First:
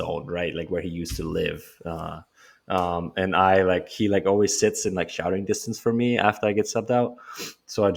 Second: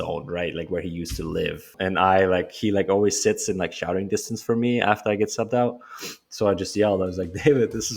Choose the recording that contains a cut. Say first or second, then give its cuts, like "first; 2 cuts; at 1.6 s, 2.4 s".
second; 1 cut; at 1.7 s